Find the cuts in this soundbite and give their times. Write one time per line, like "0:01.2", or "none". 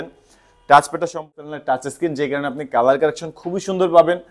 0:01.3

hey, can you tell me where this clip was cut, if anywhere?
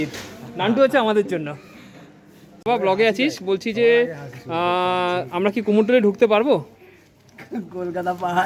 0:02.6

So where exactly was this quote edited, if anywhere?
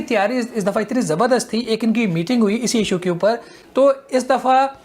0:03.5

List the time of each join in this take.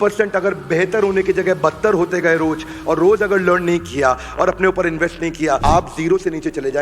0:05.6

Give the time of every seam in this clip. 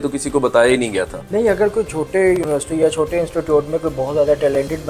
0:01.2

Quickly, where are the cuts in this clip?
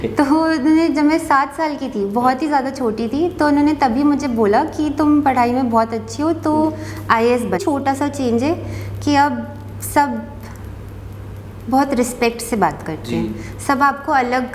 0:07.6

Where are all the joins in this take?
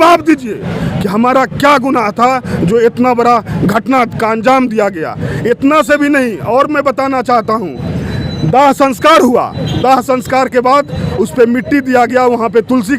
none

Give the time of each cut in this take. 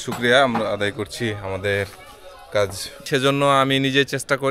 0:03.0

